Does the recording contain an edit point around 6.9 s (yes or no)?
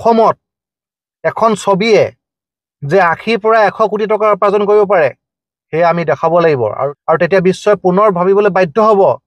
yes